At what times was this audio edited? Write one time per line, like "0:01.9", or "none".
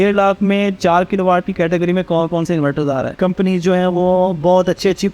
0:03.1